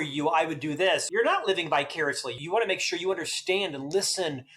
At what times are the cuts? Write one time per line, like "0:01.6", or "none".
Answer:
0:01.0
0:02.4